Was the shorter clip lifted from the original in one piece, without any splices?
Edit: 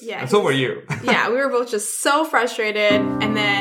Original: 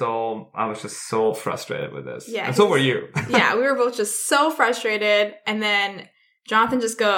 yes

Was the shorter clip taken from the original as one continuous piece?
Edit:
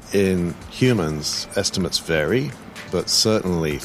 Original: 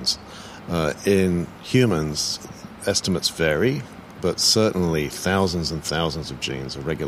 no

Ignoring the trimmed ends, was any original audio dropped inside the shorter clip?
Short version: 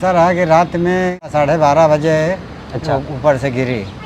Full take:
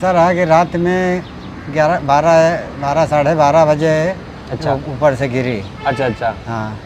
yes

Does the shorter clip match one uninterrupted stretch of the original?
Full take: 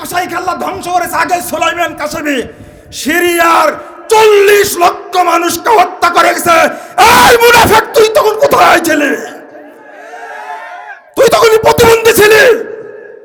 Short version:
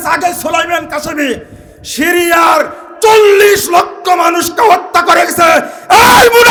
yes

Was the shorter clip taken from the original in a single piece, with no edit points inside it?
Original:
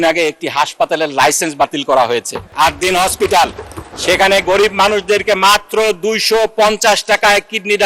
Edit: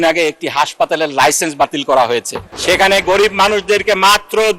no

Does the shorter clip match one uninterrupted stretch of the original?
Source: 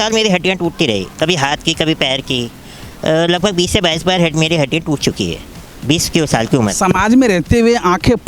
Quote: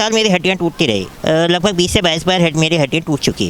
no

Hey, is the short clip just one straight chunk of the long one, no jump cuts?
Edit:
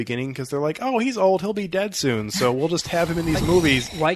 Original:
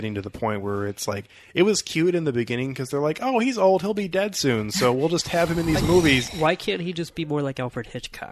yes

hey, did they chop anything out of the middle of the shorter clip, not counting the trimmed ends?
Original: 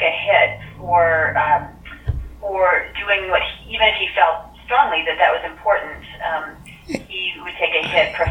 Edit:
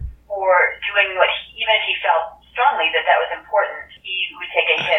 yes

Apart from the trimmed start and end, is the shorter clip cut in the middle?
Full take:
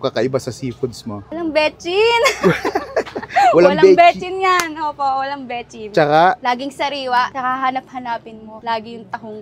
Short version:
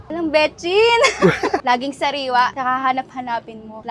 yes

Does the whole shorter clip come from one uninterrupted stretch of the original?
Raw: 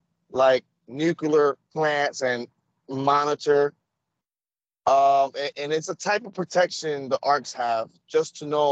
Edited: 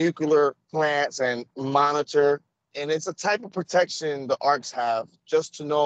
no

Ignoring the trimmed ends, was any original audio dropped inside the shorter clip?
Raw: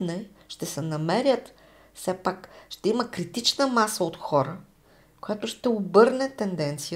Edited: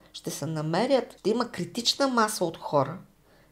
yes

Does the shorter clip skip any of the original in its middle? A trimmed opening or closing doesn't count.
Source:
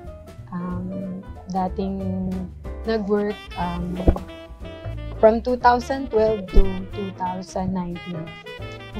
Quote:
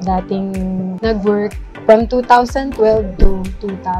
yes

